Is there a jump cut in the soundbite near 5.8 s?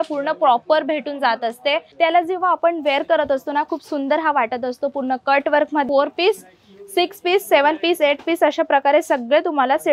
yes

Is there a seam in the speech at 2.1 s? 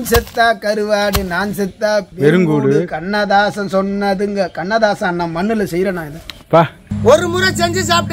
yes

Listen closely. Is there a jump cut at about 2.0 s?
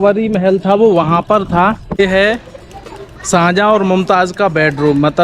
yes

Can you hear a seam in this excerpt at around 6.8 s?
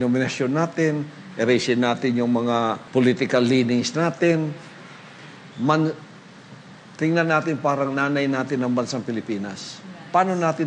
no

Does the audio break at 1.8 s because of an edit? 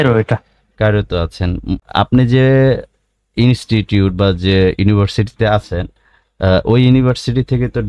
yes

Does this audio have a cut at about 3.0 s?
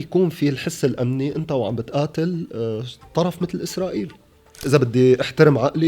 no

